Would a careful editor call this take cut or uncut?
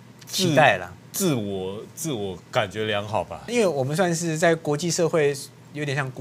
cut